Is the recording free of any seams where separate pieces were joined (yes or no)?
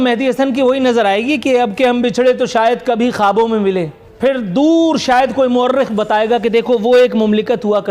no